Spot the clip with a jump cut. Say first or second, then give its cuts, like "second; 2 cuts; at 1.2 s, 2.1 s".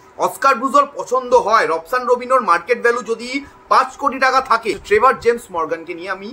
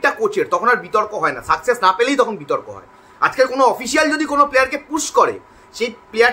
first; 1 cut; at 4.8 s